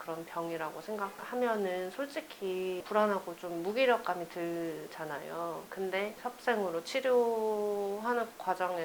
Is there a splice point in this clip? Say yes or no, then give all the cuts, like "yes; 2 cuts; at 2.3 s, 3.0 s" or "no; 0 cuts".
no; 0 cuts